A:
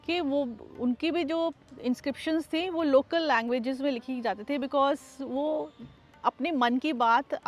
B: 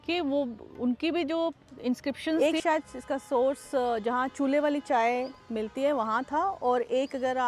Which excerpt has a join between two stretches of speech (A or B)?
B